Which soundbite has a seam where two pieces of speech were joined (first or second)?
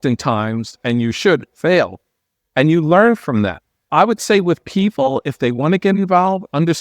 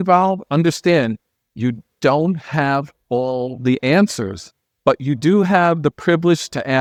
first